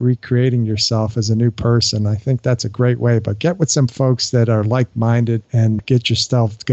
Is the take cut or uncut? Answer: cut